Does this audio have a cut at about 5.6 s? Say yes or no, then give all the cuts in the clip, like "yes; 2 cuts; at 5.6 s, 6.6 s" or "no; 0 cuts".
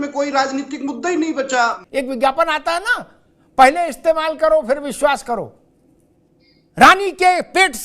yes; 2 cuts; at 1.8 s, 5.6 s